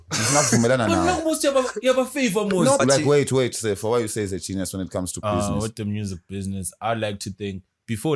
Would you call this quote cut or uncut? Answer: cut